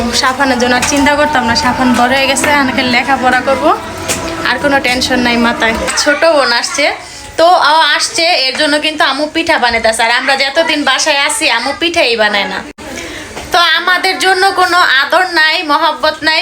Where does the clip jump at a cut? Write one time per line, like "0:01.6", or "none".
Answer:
0:05.9